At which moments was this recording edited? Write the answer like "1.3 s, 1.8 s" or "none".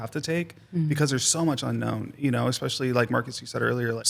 none